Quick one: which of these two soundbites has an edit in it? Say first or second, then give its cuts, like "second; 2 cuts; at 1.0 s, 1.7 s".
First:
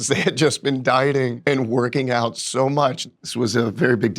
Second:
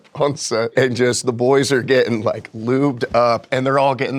first; 2 cuts; at 1.4 s, 3.0 s